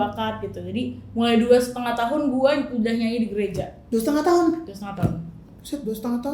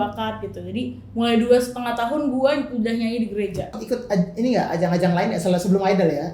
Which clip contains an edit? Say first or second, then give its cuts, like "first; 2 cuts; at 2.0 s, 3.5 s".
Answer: second; 1 cut; at 3.8 s